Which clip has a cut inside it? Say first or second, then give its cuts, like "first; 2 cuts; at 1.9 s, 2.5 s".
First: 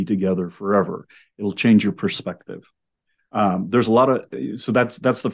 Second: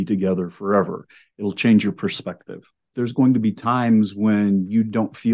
second; 1 cut; at 2.9 s